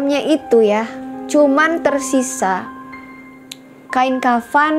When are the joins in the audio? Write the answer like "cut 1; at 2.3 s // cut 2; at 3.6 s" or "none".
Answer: none